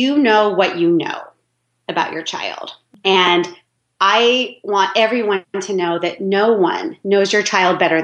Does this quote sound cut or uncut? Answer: cut